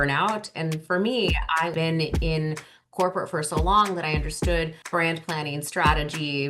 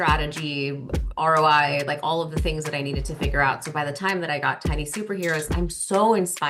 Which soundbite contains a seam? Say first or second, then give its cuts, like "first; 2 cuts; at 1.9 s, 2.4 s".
first; 2 cuts; at 1.7 s, 4.8 s